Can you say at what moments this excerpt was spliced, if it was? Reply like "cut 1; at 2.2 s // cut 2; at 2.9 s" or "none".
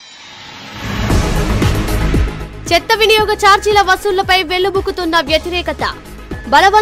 cut 1; at 2.2 s